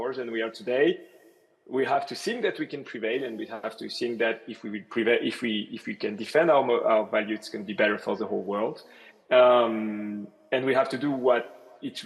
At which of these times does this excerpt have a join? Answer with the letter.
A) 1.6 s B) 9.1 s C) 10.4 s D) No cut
D